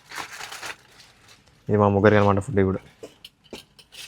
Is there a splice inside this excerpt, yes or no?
no